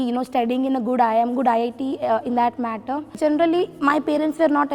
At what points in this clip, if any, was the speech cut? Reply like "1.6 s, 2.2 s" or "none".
3.2 s